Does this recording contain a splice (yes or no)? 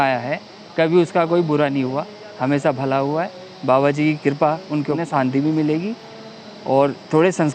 yes